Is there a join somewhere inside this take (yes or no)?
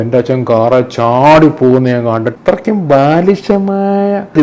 yes